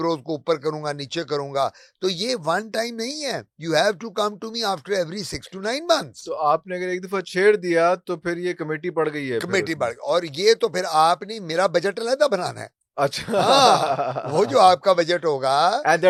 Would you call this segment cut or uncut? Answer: uncut